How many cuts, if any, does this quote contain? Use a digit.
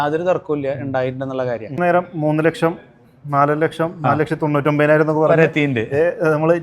1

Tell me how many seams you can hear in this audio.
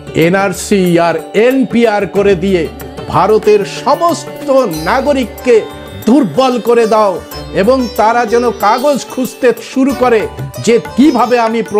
1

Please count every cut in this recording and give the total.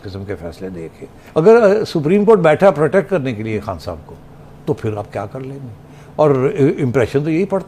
1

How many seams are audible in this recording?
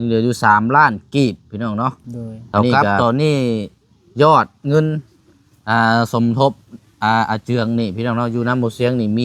1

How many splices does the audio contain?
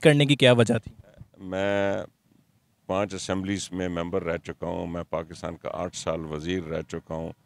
1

